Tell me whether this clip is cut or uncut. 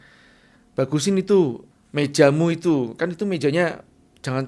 uncut